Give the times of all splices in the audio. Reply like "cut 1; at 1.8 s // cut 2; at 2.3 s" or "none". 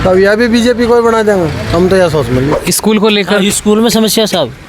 cut 1; at 2.6 s